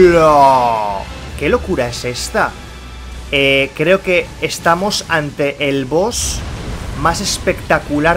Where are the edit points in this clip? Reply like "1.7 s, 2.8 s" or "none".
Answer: 1.2 s